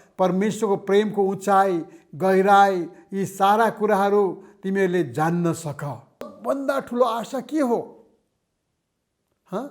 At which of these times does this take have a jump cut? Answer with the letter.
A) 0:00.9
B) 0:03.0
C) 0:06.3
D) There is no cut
C